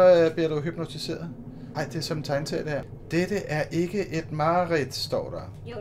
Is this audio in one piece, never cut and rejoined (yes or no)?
yes